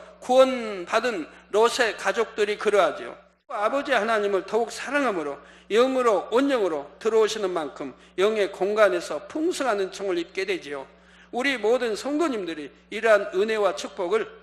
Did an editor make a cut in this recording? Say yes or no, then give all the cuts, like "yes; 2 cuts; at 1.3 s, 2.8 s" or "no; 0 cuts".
yes; 1 cut; at 3.6 s